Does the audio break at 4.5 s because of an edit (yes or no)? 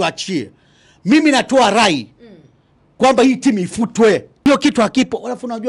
yes